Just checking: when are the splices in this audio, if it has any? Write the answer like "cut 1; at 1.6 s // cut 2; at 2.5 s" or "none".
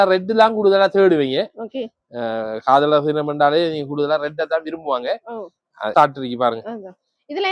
cut 1; at 5.9 s